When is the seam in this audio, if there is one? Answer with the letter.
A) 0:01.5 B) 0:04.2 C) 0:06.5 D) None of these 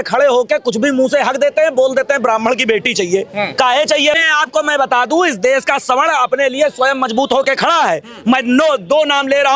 B